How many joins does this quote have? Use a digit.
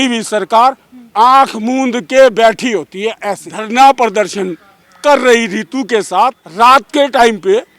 2